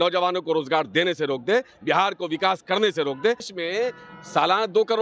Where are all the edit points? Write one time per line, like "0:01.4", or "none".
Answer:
0:03.5